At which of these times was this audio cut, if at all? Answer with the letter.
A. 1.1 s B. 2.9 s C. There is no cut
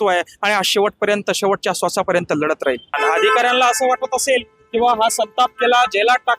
B